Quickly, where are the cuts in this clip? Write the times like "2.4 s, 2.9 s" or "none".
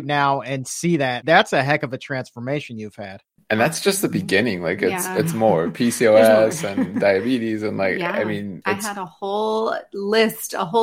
1.2 s, 3.3 s, 8.6 s